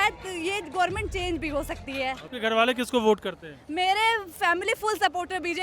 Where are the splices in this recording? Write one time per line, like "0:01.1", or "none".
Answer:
0:02.3